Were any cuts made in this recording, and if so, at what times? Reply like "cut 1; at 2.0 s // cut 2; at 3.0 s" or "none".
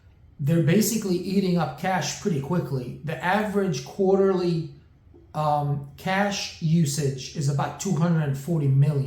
none